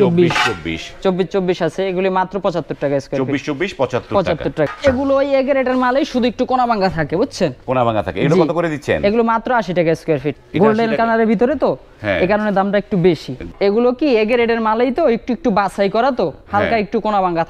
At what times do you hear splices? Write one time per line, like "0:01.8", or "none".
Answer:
0:04.7
0:10.4
0:13.4